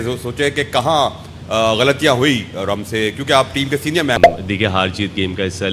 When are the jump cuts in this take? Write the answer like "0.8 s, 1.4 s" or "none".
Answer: 4.2 s